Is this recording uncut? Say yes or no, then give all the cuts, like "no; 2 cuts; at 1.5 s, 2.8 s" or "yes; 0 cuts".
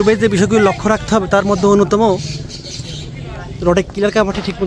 yes; 0 cuts